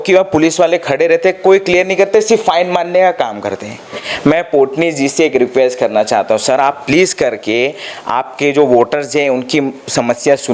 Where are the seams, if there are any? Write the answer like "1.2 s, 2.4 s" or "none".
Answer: 4.0 s